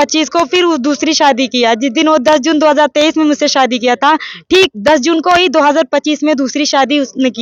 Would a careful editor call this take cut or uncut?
uncut